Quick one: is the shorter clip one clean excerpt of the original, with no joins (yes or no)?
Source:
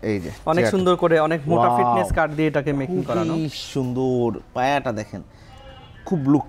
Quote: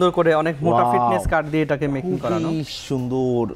yes